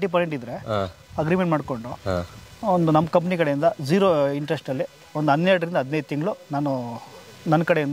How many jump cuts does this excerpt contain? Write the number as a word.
zero